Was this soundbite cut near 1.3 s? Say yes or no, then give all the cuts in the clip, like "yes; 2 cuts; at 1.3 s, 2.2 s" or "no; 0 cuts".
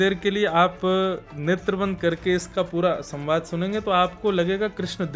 yes; 1 cut; at 1.3 s